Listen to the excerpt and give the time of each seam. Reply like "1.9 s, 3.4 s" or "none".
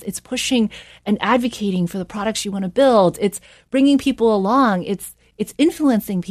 none

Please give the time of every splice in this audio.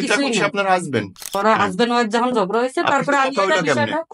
1.4 s

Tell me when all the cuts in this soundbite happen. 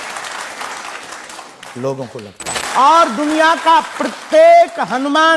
2.6 s

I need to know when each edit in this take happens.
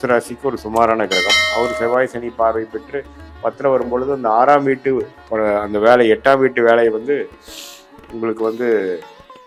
none

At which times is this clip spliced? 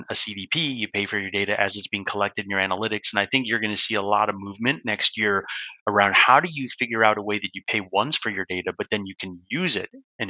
none

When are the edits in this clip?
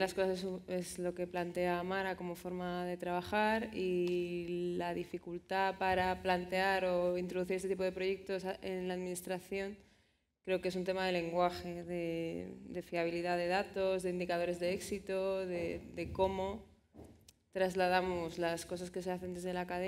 2.2 s

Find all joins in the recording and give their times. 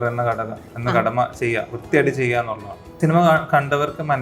3.0 s

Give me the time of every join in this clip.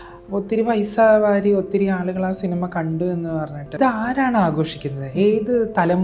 3.8 s

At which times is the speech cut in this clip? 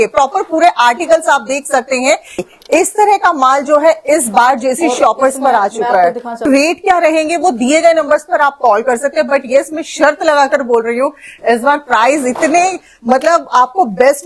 2.4 s, 6.4 s

